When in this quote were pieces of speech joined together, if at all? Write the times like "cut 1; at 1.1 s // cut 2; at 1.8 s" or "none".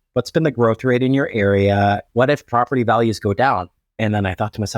cut 1; at 2.0 s // cut 2; at 3.8 s